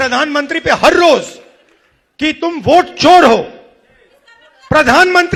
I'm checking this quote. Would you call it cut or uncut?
uncut